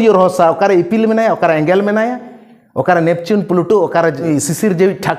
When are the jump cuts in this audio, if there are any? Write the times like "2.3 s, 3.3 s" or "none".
4.2 s